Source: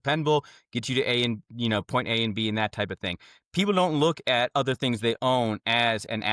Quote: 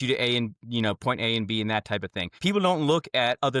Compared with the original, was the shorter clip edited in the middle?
yes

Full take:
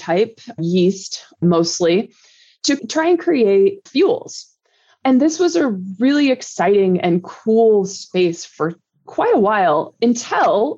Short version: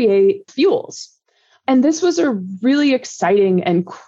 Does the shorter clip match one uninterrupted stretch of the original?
yes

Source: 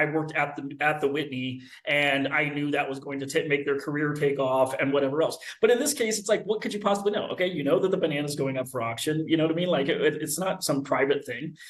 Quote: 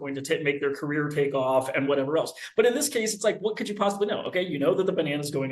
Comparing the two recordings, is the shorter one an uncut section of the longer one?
yes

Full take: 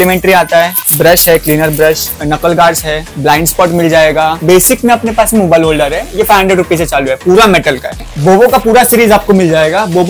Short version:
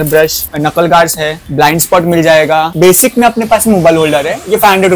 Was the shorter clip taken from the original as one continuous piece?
yes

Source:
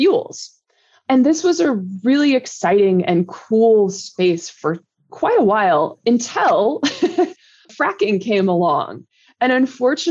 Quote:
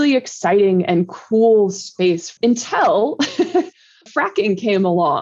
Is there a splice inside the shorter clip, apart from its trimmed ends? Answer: yes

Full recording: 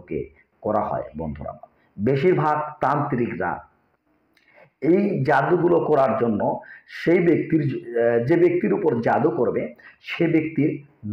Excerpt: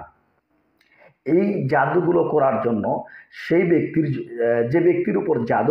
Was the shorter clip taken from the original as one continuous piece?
yes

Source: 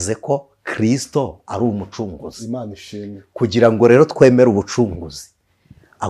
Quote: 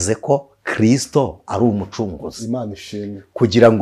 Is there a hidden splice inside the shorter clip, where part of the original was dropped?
no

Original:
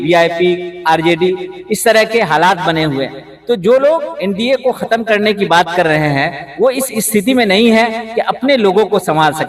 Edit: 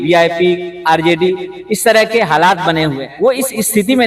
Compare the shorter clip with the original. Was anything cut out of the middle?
yes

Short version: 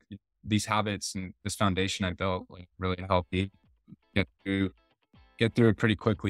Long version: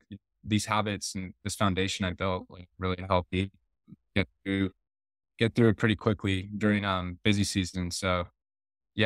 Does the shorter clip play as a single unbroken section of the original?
yes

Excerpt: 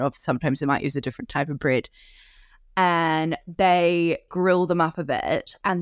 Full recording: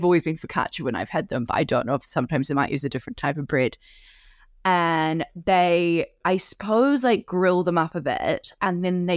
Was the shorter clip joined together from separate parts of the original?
yes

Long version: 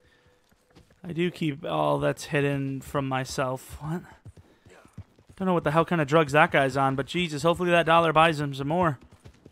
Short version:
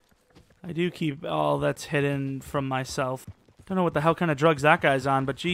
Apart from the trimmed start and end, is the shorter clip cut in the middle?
yes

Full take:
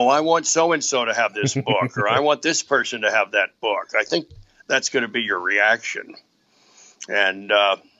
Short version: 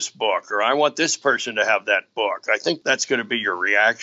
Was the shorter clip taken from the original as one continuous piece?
no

